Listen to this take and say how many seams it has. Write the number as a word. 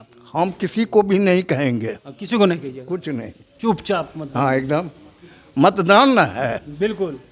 zero